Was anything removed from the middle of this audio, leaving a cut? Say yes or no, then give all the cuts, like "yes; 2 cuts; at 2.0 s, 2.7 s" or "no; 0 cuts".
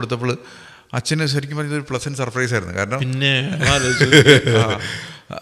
no; 0 cuts